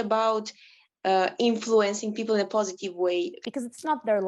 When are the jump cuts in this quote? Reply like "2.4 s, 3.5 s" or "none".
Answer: 3.4 s